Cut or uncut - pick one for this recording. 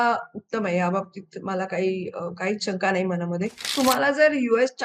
cut